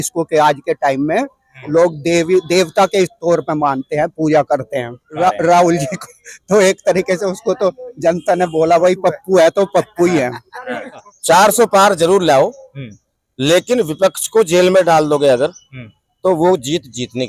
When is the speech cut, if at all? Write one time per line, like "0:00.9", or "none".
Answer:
0:05.1
0:11.1